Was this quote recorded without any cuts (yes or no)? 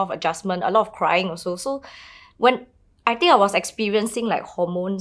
yes